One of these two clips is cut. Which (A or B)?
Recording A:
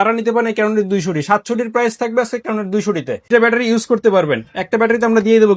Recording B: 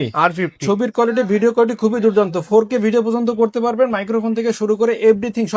A